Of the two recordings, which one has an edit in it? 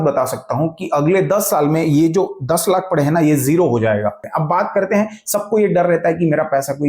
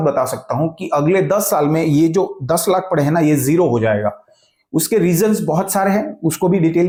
first; 1 cut; at 4.2 s

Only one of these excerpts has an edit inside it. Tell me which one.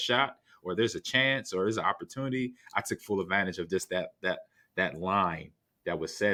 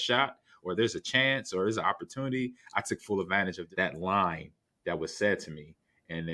second; 1 cut; at 3.6 s

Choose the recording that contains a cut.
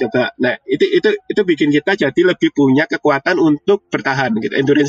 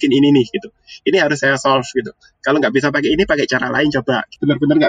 first; 1 cut; at 3.9 s

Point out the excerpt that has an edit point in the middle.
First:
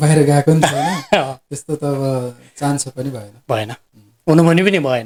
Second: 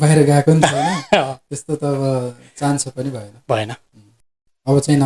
second; 1 cut; at 4.1 s

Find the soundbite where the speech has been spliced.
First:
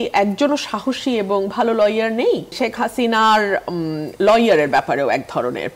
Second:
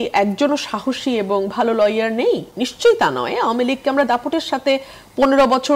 first; 1 cut; at 2.5 s

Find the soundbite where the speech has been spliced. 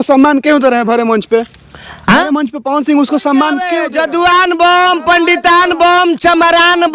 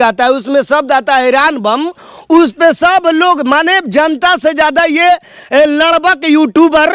first; 1 cut; at 3.8 s

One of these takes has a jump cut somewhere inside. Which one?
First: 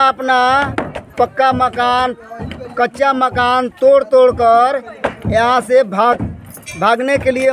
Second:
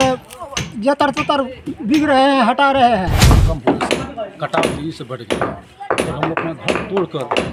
second; 1 cut; at 3.1 s

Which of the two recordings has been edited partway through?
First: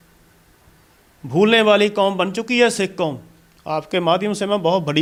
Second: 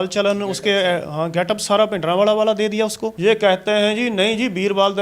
second; 1 cut; at 3.1 s

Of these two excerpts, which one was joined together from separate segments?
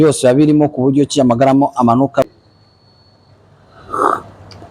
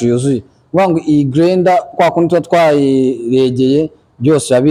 first; 1 cut; at 2.2 s

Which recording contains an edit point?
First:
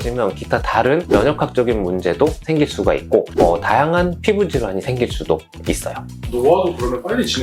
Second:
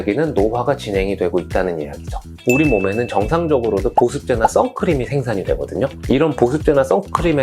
second; 1 cut; at 2.4 s

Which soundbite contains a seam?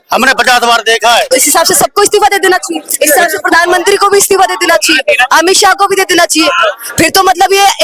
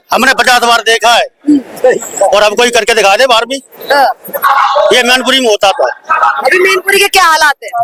first; 2 cuts; at 1.3 s, 2.9 s

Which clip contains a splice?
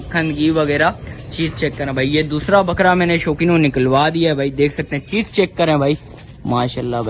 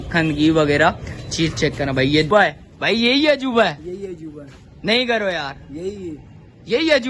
second; 1 cut; at 2.3 s

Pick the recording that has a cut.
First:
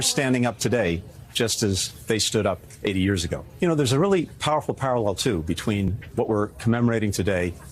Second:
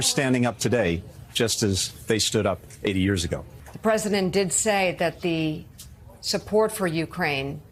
first; 1 cut; at 3.4 s

